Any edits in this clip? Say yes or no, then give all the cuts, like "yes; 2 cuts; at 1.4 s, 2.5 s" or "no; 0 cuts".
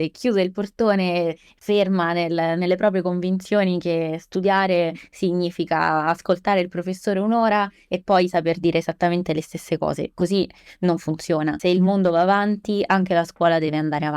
yes; 1 cut; at 11.6 s